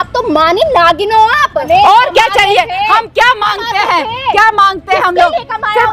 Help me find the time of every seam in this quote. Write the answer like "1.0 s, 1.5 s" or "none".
1.7 s